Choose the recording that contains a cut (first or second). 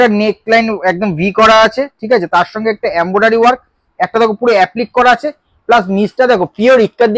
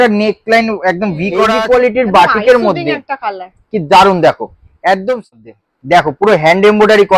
second